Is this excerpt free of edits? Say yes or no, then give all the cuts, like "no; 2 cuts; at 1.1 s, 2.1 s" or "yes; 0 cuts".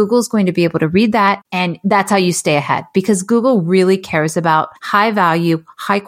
no; 2 cuts; at 1.5 s, 4.8 s